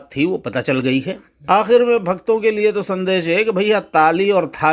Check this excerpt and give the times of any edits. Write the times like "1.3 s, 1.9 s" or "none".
1.3 s